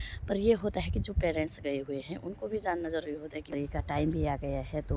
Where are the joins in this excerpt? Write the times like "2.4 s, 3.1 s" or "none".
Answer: 3.5 s